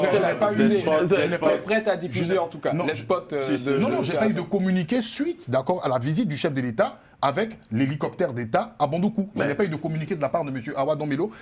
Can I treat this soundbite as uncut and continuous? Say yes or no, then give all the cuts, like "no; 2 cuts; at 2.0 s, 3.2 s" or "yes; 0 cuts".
yes; 0 cuts